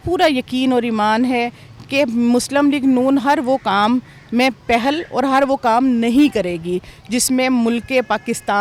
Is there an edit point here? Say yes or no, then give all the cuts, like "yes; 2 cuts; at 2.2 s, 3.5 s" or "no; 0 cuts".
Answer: no; 0 cuts